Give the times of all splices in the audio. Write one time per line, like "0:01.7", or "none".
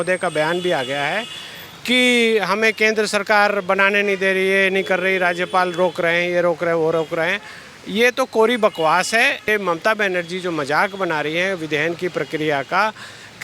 0:09.5